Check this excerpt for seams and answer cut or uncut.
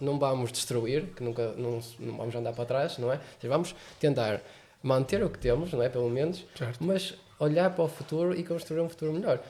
uncut